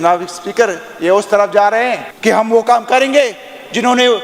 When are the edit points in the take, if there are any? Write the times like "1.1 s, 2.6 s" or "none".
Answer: 2.1 s